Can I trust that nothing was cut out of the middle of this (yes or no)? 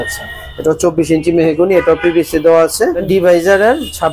no